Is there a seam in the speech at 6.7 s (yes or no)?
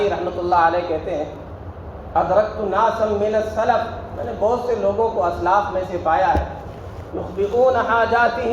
no